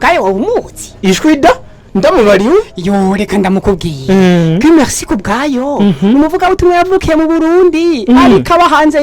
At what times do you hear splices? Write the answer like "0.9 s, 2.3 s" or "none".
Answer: none